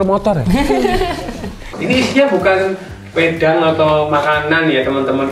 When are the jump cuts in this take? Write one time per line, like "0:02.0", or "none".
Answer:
0:01.8